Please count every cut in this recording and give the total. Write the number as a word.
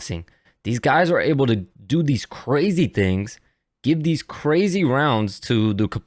zero